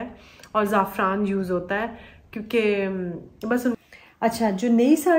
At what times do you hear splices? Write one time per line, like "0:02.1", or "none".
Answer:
0:03.8